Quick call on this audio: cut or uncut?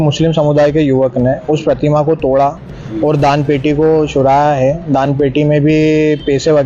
uncut